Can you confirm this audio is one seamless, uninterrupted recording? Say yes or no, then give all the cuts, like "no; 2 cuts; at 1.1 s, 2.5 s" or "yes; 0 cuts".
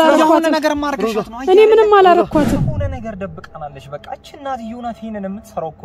no; 1 cut; at 2.6 s